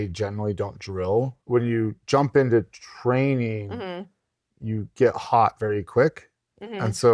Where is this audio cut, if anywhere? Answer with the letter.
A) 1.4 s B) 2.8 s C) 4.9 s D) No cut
A